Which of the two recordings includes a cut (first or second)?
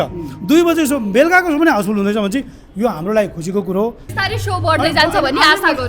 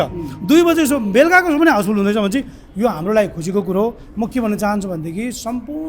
first